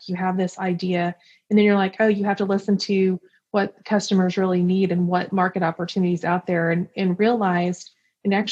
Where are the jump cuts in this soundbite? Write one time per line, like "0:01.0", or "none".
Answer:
none